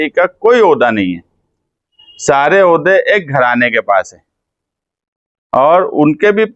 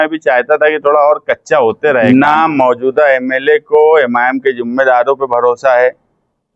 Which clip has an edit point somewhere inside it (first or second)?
second